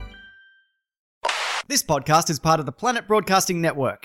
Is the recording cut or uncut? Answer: cut